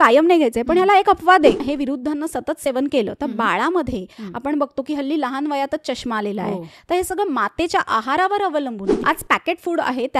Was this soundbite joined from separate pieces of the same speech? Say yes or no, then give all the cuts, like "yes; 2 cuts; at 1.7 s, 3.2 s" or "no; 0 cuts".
yes; 2 cuts; at 1.6 s, 9.0 s